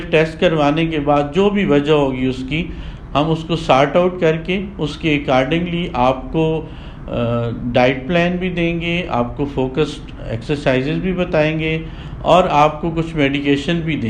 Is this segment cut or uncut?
uncut